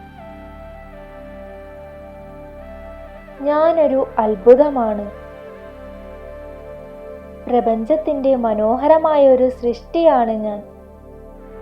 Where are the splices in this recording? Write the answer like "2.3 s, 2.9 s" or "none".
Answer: 2.8 s, 10.6 s